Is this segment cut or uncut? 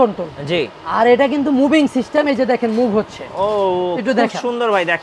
uncut